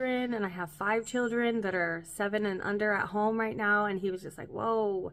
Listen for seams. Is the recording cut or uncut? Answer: uncut